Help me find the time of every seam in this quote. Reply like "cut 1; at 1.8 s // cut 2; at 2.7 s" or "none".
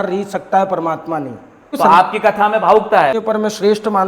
cut 1; at 1.7 s // cut 2; at 3.1 s